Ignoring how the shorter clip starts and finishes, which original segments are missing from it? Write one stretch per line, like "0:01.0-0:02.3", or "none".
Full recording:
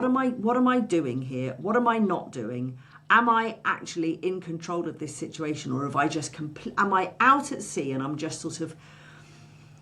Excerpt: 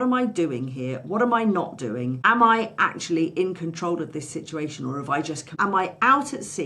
0:02.7-0:03.0
0:06.3-0:06.6